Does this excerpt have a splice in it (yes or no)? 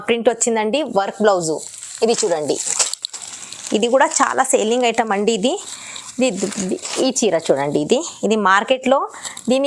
no